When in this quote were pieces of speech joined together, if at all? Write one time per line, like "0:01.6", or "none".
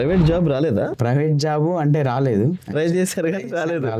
0:01.0